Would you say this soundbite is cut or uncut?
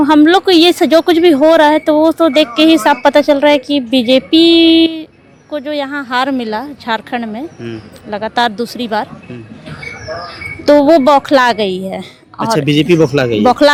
uncut